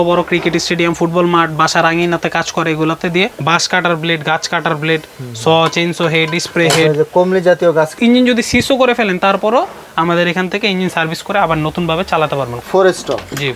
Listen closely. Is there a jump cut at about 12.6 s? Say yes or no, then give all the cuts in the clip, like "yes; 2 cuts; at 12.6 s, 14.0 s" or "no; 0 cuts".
yes; 3 cuts; at 3.4 s, 7.9 s, 12.6 s